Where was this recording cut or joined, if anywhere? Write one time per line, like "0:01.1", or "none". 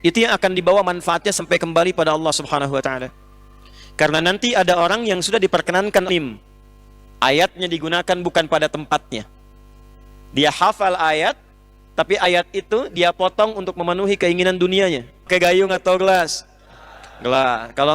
0:06.1
0:15.3

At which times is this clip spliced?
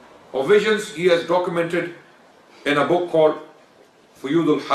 none

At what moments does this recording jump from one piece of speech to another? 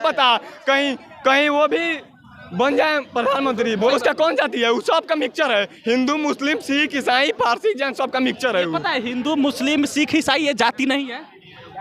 0:03.9

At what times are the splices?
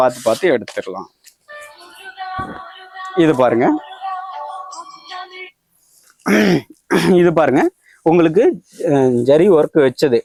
none

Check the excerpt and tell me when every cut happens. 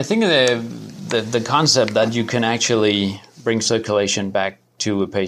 0:01.0

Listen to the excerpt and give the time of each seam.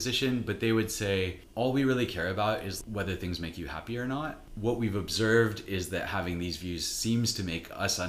0:01.4
0:02.8
0:04.4

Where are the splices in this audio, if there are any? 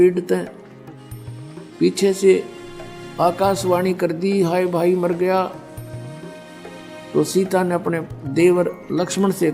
0:05.8
0:07.1

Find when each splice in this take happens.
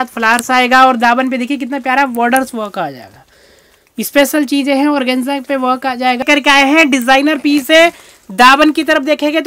0:06.2

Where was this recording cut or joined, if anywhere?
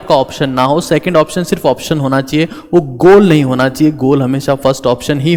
none

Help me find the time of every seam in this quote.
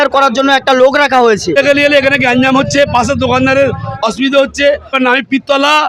0:01.6
0:05.0

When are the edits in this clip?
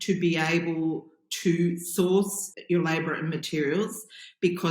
0:02.4

